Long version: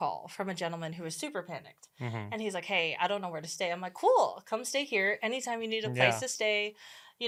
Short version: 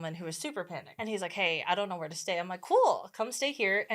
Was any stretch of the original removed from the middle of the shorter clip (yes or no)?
yes